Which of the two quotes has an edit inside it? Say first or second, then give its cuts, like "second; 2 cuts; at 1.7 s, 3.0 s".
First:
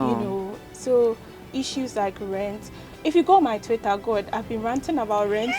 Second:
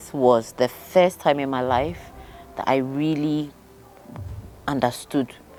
first; 1 cut; at 1.4 s